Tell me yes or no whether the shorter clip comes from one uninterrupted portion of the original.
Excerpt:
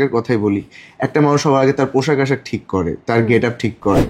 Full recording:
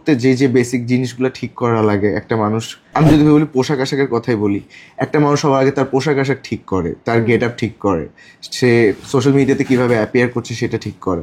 yes